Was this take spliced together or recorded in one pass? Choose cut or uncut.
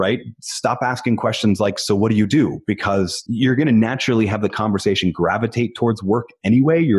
cut